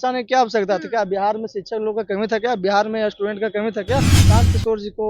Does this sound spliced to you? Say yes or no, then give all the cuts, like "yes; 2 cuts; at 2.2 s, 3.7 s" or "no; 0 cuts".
yes; 1 cut; at 4.2 s